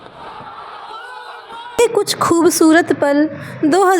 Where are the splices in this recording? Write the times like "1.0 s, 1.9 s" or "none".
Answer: 1.8 s